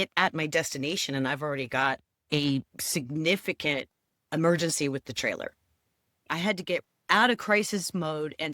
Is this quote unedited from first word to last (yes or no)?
no